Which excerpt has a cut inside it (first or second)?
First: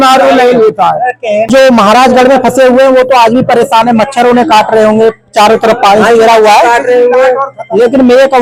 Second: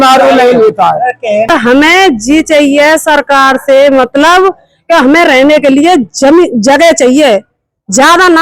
second